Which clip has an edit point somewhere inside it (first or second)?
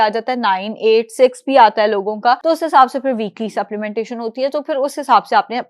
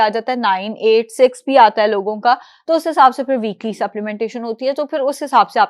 first